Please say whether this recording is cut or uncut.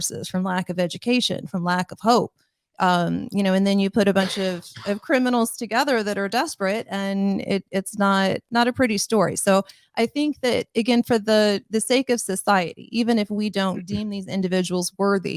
uncut